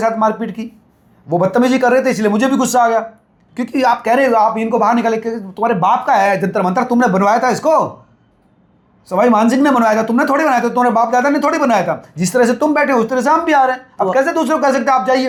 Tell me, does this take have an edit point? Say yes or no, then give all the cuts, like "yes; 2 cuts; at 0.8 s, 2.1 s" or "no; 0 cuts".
no; 0 cuts